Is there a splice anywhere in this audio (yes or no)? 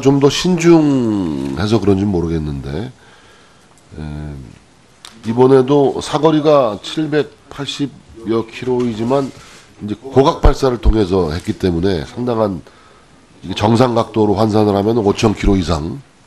no